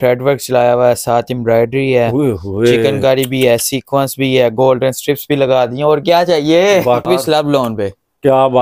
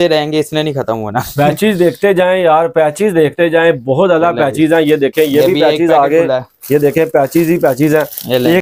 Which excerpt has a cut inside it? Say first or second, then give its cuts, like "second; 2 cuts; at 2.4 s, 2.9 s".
first; 1 cut; at 7.1 s